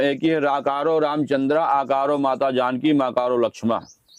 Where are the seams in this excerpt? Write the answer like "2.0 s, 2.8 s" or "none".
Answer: none